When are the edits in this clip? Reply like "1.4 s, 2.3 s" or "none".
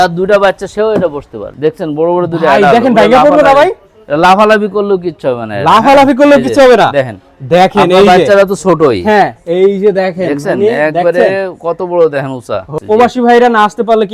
1.4 s, 12.7 s